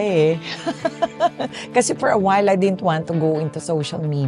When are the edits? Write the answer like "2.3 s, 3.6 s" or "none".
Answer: none